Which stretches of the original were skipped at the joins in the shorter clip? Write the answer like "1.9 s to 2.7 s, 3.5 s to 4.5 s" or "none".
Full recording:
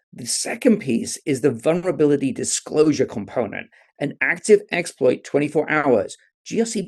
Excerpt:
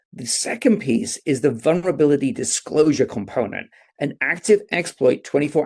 none